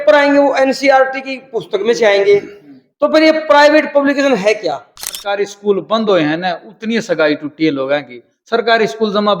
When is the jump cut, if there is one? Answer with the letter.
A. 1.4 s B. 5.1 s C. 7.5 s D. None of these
B